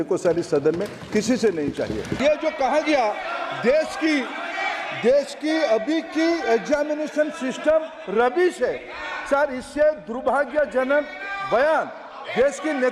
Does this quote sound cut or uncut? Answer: cut